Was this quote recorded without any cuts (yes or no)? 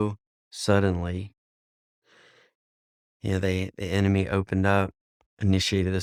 yes